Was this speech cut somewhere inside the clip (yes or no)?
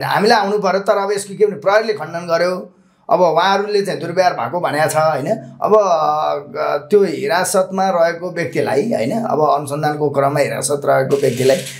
no